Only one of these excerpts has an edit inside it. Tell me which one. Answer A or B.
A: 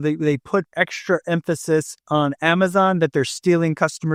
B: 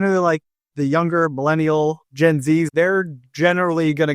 B